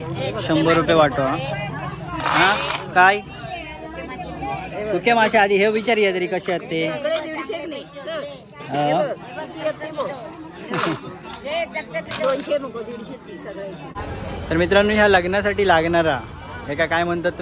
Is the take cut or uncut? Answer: cut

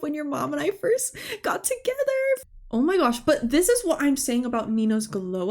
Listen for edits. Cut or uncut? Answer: cut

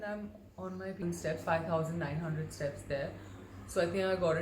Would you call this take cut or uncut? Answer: cut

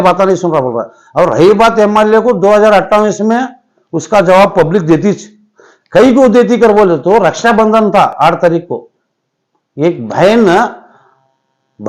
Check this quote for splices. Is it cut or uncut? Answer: uncut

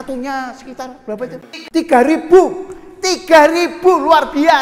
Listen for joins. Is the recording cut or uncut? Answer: cut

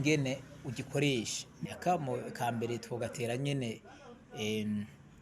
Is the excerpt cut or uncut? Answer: cut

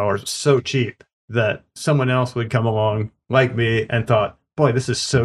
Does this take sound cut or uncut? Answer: uncut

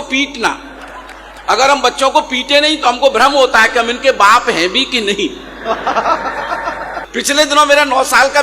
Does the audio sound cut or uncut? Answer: cut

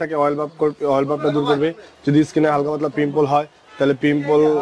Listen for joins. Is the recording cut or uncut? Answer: uncut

